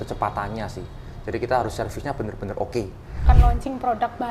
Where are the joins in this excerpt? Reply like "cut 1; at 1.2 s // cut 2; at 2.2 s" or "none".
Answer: cut 1; at 3.2 s